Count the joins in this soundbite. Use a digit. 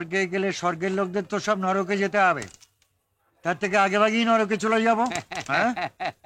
0